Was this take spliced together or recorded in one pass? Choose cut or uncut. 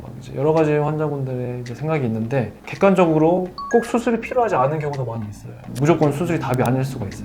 cut